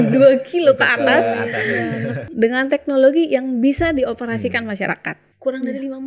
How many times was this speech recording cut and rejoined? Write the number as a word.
two